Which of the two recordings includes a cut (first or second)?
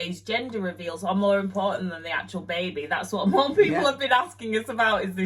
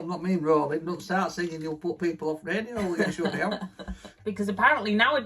second